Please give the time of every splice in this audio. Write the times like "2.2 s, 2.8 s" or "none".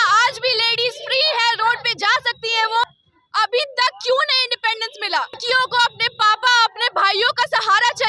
2.9 s, 5.4 s